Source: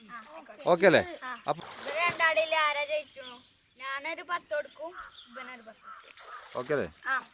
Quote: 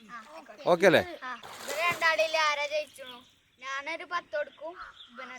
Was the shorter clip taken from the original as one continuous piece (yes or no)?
no